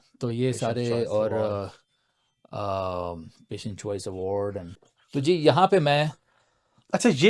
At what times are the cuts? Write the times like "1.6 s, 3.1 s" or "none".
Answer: 4.8 s